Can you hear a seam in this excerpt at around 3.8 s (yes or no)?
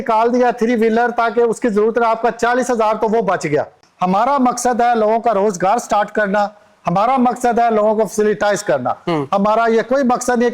yes